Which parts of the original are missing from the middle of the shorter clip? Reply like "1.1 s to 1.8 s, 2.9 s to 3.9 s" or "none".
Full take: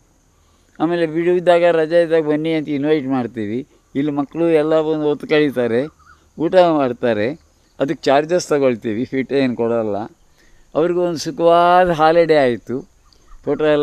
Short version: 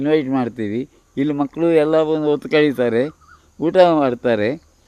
none